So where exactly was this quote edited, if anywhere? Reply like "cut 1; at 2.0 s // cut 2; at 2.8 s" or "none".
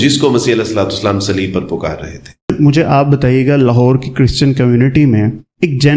cut 1; at 2.5 s